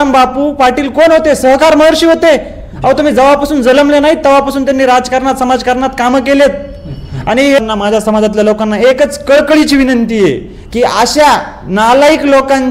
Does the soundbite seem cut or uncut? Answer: cut